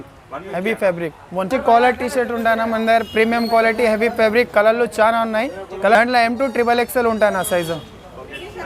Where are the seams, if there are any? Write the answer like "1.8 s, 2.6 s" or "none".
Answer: 1.5 s, 6.0 s